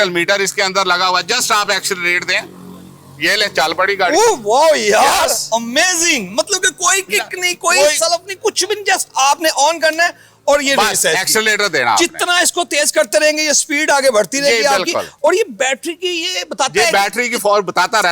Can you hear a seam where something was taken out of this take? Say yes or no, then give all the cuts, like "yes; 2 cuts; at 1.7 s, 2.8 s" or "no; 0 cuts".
no; 0 cuts